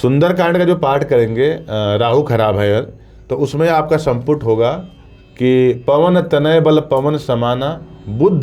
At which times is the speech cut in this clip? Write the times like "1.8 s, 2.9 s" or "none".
none